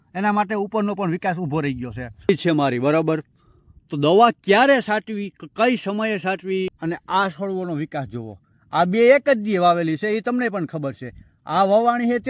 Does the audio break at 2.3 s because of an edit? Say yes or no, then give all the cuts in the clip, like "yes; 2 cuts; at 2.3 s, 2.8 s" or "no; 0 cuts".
yes; 2 cuts; at 2.3 s, 6.8 s